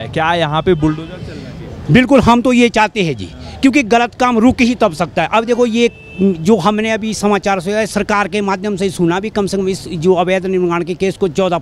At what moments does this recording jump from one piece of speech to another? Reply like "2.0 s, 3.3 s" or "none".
none